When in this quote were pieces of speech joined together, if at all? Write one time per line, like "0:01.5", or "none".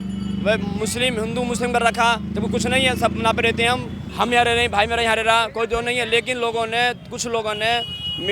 0:04.0